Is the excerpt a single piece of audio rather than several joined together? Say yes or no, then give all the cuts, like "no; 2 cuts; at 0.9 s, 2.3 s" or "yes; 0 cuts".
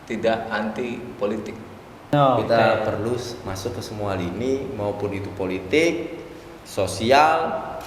no; 1 cut; at 2.1 s